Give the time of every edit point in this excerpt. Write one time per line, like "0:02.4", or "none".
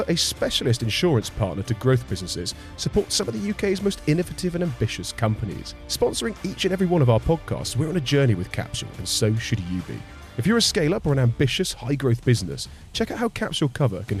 none